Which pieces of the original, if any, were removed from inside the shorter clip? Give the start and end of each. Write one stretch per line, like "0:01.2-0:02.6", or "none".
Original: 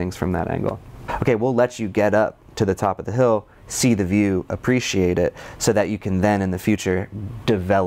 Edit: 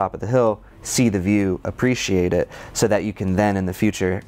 none